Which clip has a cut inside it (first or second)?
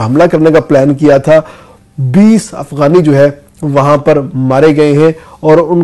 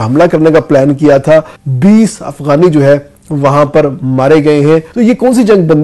second